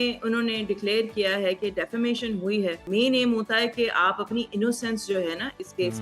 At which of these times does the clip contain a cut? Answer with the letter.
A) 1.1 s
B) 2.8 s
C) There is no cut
B